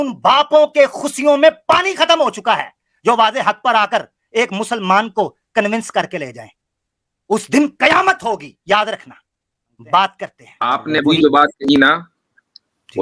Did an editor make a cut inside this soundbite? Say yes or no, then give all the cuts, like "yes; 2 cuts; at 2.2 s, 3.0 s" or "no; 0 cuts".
yes; 1 cut; at 10.6 s